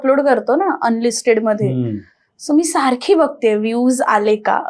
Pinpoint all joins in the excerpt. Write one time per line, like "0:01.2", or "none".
none